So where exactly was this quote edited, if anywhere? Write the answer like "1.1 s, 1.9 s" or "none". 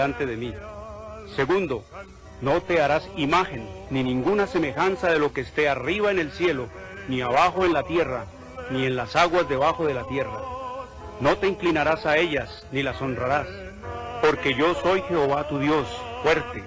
none